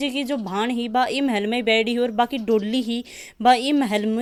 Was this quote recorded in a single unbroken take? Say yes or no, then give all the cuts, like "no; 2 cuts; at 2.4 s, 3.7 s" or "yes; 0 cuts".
yes; 0 cuts